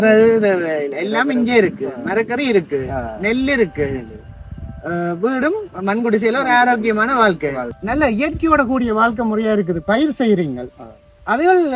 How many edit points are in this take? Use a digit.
1